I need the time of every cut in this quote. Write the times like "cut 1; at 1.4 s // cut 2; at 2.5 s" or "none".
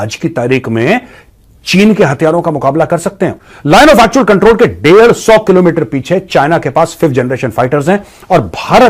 cut 1; at 3.4 s